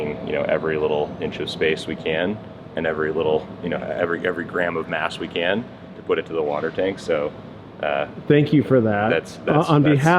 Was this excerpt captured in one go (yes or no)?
yes